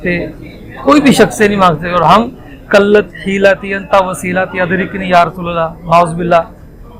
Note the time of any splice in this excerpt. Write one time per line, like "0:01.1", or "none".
none